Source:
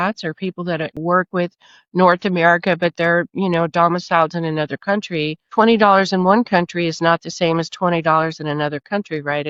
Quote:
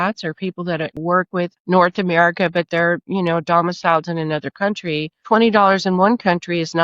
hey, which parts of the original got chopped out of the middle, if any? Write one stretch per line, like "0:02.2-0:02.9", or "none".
0:01.6-0:01.8